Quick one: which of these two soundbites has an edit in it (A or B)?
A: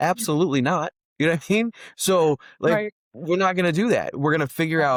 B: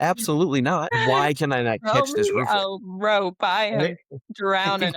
B